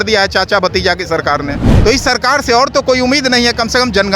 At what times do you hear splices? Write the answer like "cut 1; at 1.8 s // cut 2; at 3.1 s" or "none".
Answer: cut 1; at 1.7 s